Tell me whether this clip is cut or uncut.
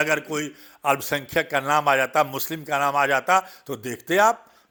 uncut